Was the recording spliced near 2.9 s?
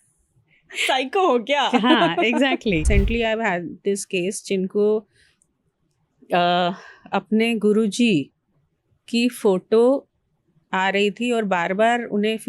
yes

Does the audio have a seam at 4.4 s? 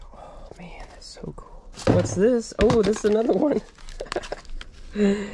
no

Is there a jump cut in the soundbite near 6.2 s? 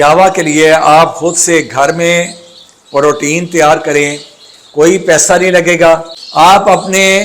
yes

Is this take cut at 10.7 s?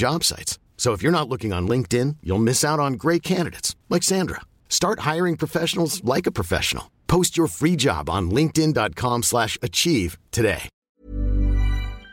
yes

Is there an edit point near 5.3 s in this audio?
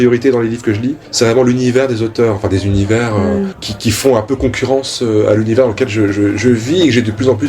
no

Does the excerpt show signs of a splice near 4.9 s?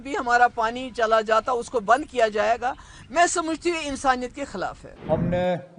yes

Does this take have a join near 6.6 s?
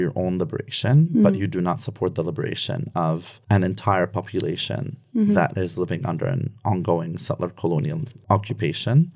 no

